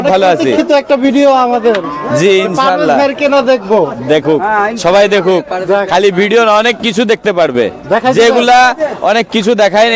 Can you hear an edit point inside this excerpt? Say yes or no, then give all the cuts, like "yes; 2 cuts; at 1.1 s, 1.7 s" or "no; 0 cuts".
no; 0 cuts